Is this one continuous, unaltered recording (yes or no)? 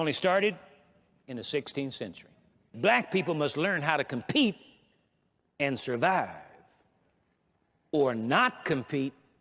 no